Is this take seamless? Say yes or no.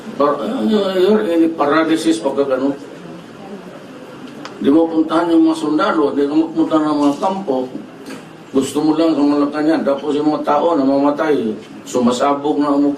no